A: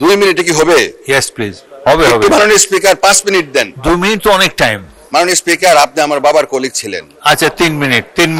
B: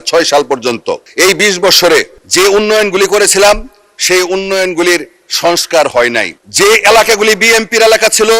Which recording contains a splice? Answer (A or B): B